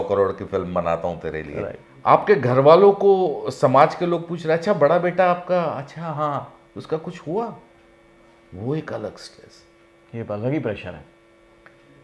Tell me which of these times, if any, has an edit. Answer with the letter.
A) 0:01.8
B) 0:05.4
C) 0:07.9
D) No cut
A